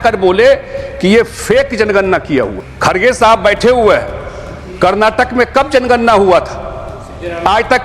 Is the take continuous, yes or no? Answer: no